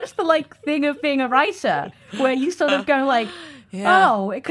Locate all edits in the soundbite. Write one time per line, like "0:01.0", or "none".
none